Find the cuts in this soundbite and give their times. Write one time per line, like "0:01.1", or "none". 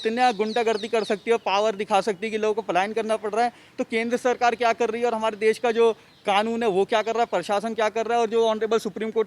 none